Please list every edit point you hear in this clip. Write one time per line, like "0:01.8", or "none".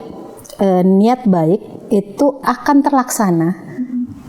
0:02.4